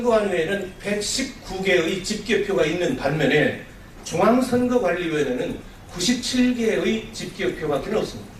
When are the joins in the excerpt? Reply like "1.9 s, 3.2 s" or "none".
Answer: 3.5 s